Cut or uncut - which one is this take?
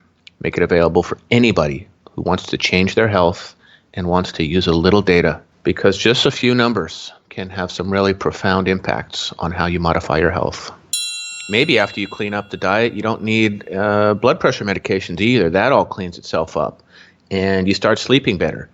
cut